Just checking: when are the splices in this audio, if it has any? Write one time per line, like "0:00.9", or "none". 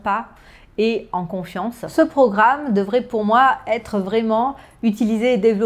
0:01.8

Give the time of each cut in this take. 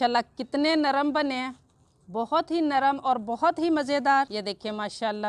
0:04.3

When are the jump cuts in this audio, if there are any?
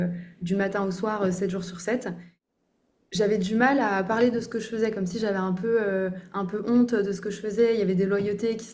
0:02.3

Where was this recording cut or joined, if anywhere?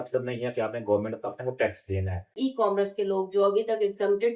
0:02.3

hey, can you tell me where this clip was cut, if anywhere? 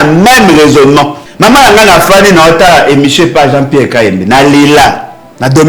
0:01.2

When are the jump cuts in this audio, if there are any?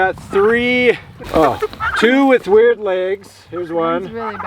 0:01.1

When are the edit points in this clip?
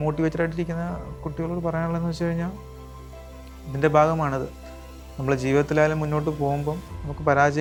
none

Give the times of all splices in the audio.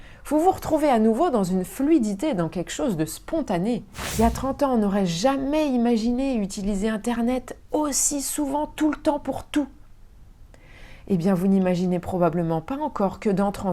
0:04.0

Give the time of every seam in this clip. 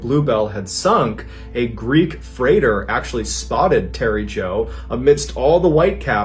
none

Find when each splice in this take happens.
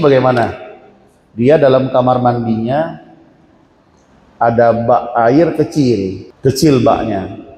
0:06.2

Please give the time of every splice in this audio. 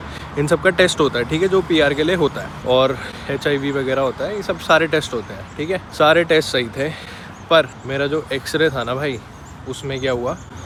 none

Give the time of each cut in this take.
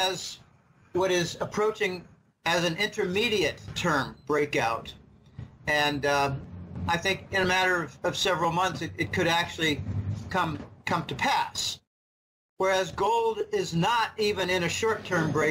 none

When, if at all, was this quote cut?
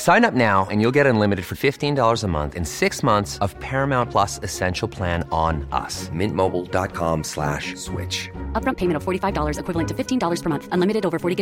none

